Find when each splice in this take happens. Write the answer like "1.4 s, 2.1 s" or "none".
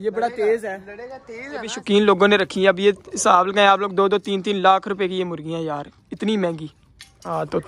1.7 s, 6.7 s

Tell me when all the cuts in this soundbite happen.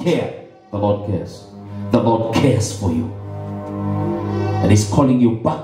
none

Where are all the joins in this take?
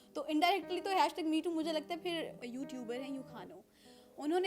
2.4 s

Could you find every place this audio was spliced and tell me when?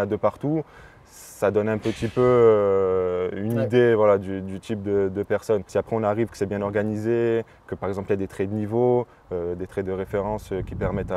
5.7 s

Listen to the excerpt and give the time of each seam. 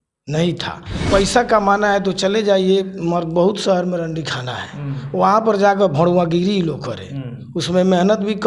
0.9 s

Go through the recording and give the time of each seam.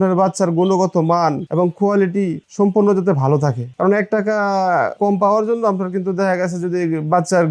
1.3 s, 2.4 s, 3.6 s, 4.9 s

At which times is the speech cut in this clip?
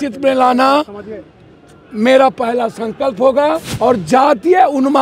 3.7 s

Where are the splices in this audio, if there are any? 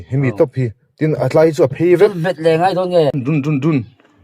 3.2 s

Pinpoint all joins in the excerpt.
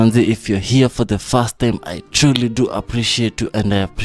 none

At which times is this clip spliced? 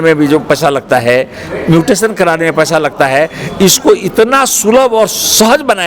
none

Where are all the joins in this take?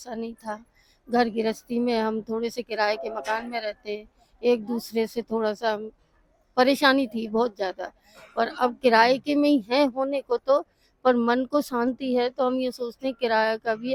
none

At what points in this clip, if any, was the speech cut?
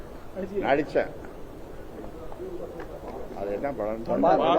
none

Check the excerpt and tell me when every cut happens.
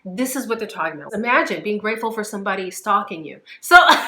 1.0 s

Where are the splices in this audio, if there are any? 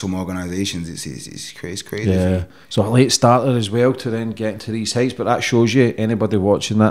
none

